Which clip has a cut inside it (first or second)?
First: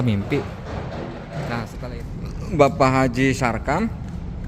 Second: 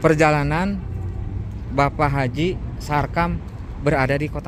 first